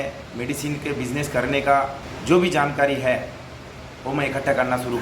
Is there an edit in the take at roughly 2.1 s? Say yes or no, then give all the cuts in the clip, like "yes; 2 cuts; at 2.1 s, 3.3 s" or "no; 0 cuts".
yes; 1 cut; at 2.1 s